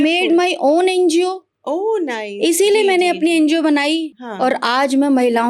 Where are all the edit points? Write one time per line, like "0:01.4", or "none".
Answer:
0:04.1